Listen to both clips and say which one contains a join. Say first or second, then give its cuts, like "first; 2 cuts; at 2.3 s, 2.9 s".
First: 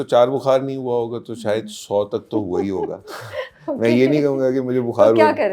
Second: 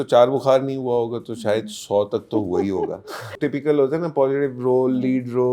second; 1 cut; at 3.3 s